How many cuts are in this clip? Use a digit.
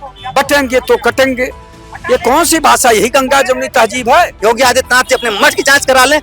1